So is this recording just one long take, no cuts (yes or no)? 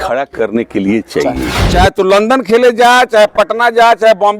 no